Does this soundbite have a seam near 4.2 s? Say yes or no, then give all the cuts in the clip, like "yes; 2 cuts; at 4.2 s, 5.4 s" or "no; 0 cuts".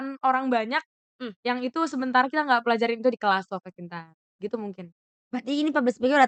no; 0 cuts